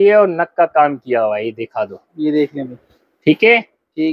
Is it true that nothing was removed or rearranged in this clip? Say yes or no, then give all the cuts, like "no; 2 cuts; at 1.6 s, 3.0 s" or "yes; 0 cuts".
yes; 0 cuts